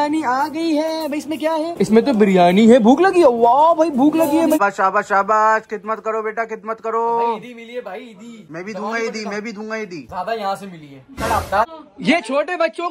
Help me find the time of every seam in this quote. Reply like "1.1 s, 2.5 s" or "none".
4.6 s, 11.7 s